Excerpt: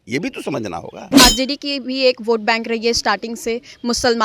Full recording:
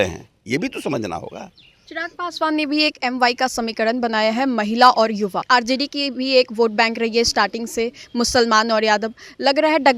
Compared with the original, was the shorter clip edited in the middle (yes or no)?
yes